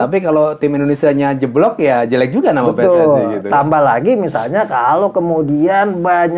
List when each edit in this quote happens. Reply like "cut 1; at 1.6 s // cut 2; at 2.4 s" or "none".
none

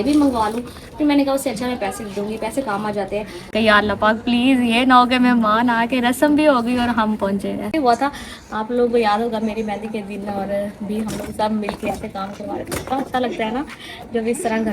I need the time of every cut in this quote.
cut 1; at 3.5 s // cut 2; at 7.7 s

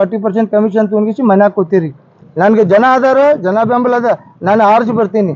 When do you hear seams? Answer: cut 1; at 2.2 s

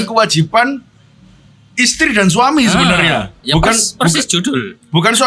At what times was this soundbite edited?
none

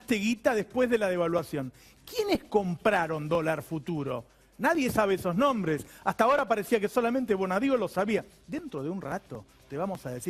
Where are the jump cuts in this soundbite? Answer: cut 1; at 8.0 s

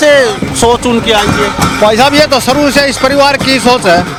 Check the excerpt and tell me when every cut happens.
none

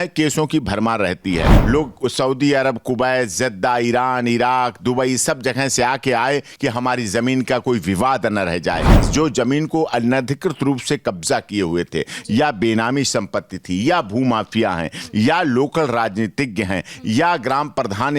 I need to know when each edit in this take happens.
cut 1; at 1.5 s // cut 2; at 9.0 s

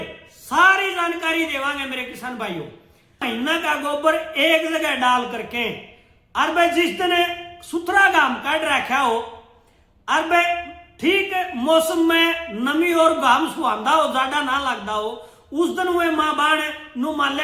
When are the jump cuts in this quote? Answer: cut 1; at 3.3 s

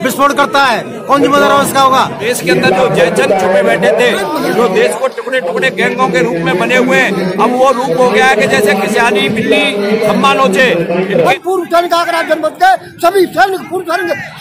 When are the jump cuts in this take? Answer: cut 1; at 2.2 s // cut 2; at 11.3 s

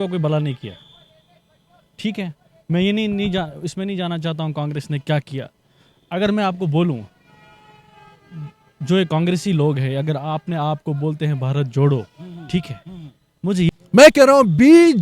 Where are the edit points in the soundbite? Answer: cut 1; at 13.6 s

